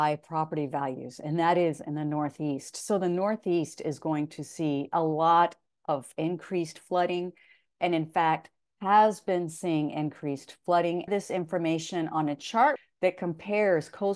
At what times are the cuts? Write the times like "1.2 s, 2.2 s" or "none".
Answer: none